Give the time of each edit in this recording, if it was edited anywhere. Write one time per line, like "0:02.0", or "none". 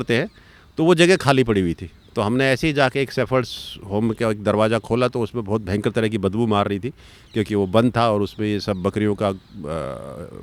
none